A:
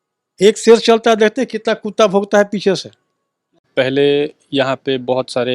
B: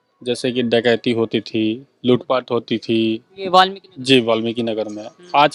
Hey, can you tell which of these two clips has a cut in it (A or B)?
A